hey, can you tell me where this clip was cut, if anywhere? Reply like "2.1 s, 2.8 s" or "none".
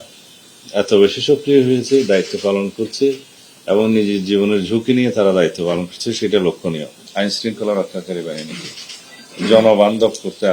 7.0 s